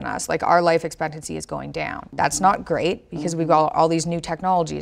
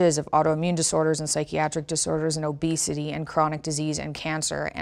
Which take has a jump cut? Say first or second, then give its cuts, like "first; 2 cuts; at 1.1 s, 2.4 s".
first; 1 cut; at 2.0 s